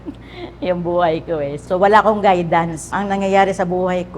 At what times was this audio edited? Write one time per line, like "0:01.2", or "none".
0:01.6
0:02.9